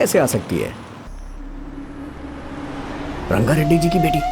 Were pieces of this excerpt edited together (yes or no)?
yes